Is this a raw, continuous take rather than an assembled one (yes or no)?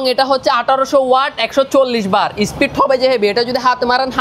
yes